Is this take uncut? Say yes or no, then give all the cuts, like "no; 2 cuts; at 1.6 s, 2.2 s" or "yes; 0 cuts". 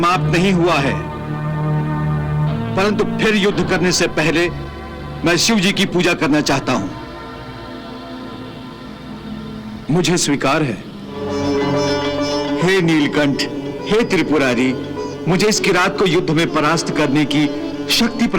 no; 1 cut; at 11.3 s